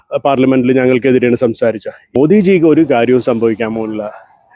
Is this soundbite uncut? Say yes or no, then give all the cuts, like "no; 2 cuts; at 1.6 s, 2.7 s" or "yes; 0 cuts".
no; 1 cut; at 2.1 s